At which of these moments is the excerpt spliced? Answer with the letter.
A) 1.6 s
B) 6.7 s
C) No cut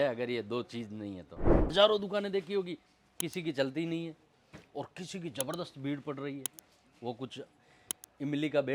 A